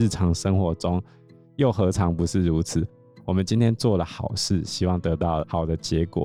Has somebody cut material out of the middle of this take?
no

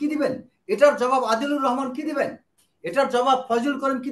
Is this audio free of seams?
yes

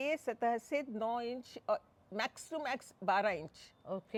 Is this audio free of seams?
yes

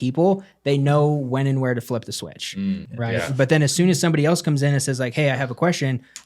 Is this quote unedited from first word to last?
no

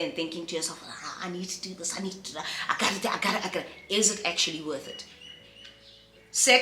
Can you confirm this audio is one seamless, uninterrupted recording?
yes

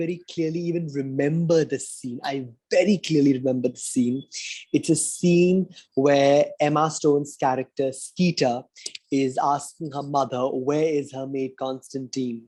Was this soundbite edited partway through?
no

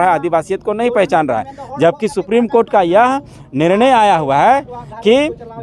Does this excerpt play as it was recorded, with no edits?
yes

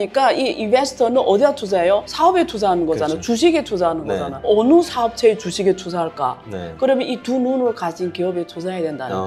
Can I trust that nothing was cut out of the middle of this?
yes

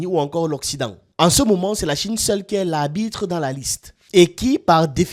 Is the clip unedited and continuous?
yes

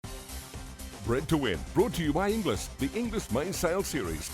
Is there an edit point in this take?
yes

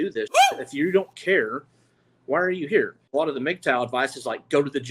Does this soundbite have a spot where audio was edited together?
yes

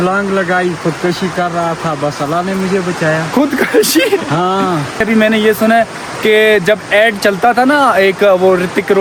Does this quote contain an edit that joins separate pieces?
no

